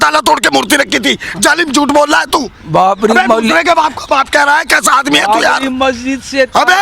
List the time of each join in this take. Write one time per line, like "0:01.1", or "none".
none